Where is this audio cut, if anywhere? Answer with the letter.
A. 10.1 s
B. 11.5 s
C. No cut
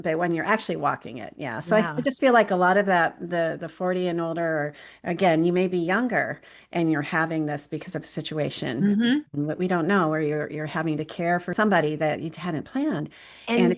B